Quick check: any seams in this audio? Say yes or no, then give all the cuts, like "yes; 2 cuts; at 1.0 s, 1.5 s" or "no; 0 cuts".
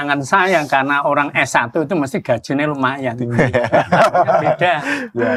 no; 0 cuts